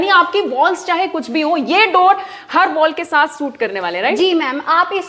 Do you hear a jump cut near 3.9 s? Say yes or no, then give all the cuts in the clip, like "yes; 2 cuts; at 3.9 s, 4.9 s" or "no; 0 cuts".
no; 0 cuts